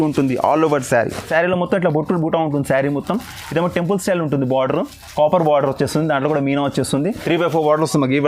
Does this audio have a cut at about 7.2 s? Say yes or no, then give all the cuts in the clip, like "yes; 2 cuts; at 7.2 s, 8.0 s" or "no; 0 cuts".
yes; 2 cuts; at 1.2 s, 7.2 s